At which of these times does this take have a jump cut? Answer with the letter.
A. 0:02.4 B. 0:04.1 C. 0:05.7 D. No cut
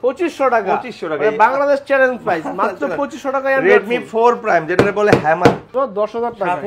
C